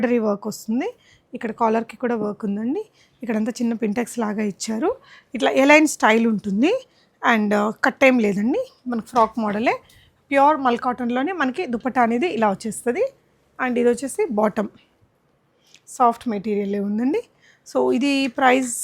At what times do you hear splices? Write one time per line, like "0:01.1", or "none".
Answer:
none